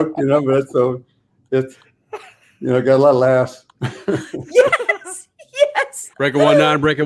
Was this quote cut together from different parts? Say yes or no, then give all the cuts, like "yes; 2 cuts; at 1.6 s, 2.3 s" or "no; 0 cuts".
yes; 1 cut; at 6.0 s